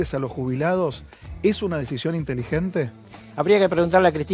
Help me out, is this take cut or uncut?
uncut